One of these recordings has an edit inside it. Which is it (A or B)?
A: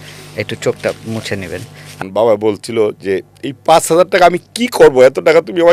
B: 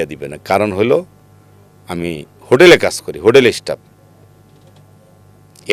A